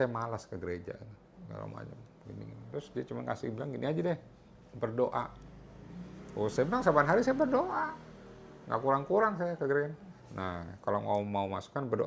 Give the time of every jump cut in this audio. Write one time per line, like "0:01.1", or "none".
none